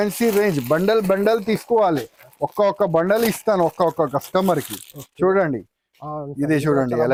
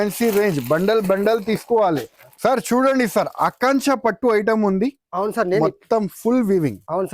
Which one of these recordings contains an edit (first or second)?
second